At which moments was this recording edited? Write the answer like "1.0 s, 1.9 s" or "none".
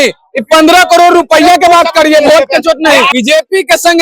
3.1 s